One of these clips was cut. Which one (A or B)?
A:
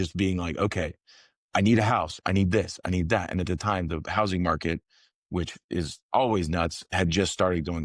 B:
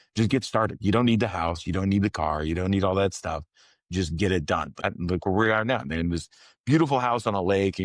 B